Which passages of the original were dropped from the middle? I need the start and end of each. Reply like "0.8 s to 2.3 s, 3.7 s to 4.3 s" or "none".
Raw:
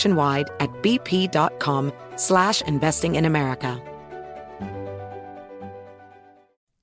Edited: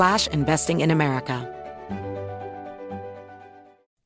3.8 s to 4.1 s